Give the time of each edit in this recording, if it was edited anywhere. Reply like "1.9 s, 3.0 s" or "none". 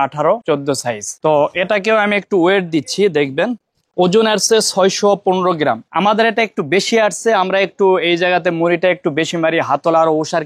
5.9 s